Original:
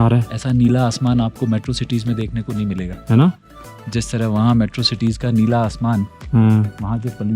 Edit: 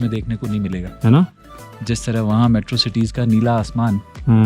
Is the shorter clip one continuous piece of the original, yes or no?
yes